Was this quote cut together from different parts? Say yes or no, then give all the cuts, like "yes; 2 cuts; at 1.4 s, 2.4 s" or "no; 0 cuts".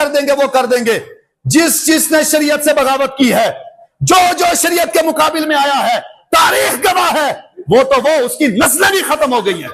no; 0 cuts